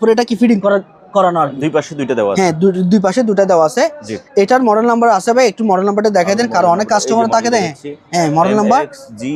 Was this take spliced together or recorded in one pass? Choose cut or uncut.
uncut